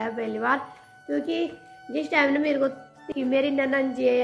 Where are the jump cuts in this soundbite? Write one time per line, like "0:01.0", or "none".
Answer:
0:03.1